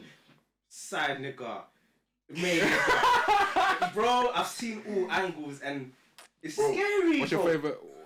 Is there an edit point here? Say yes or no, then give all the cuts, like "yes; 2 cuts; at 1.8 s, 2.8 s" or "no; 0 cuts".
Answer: no; 0 cuts